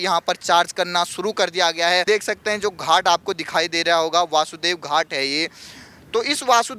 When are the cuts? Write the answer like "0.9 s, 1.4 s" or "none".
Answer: 2.1 s